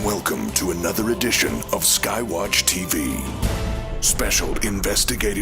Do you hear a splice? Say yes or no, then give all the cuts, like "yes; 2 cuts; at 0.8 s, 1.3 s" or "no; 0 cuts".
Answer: yes; 1 cut; at 3.8 s